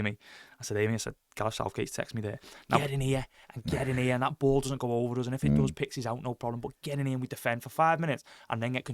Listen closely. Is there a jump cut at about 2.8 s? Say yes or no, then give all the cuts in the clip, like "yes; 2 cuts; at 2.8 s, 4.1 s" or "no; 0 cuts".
yes; 1 cut; at 2.8 s